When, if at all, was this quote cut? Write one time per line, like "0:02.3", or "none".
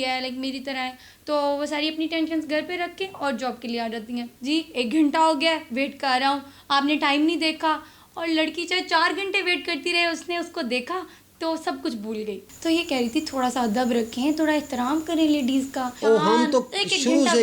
0:04.3
0:12.5
0:15.9